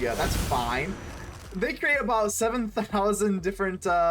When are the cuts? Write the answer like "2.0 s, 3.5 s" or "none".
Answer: none